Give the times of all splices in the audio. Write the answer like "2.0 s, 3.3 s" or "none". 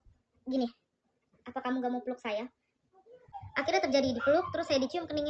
3.2 s